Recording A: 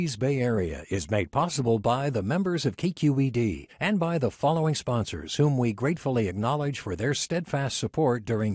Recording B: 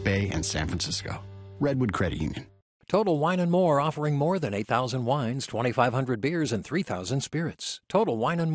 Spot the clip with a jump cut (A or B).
B